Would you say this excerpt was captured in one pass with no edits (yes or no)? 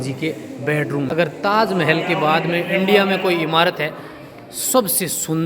no